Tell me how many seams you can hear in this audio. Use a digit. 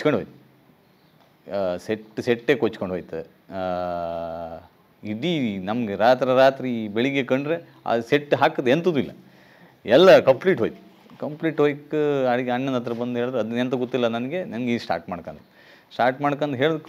0